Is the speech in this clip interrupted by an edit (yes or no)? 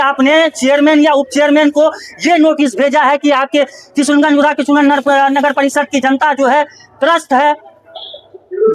no